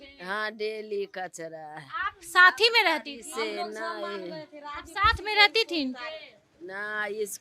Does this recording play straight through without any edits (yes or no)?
yes